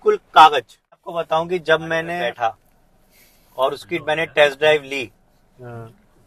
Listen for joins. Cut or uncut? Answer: cut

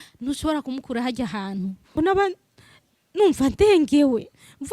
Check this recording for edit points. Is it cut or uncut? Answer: cut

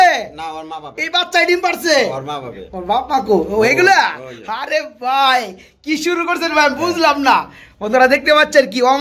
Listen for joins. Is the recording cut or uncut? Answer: uncut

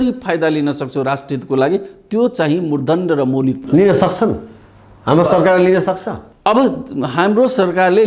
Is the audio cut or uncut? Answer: uncut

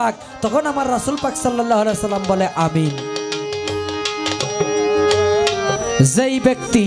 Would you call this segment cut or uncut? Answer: uncut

